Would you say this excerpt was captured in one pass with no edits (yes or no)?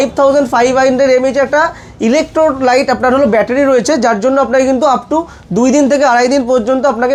yes